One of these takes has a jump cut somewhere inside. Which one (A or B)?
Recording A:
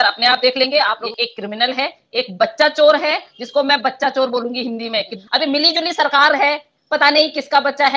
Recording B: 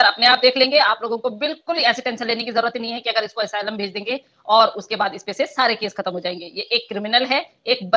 A